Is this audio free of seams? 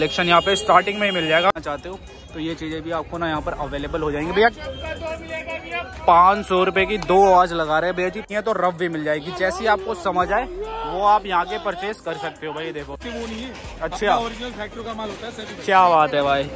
no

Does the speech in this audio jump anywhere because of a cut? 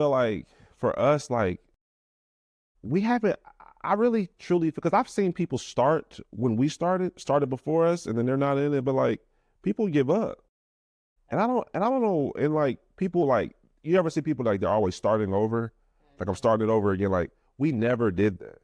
no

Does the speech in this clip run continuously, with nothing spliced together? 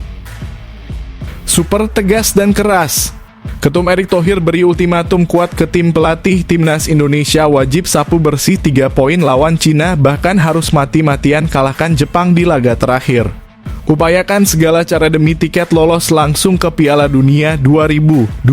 no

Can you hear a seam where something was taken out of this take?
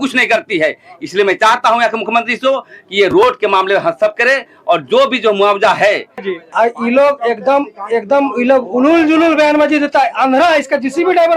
yes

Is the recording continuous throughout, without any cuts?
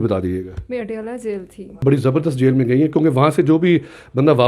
no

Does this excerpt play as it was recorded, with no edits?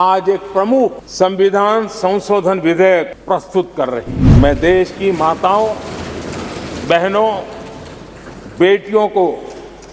no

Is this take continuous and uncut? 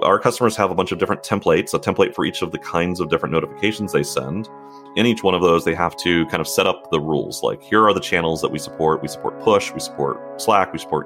yes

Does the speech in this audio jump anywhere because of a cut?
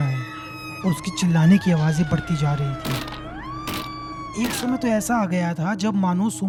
no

